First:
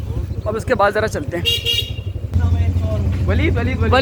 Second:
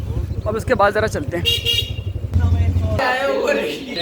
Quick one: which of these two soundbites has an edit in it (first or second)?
second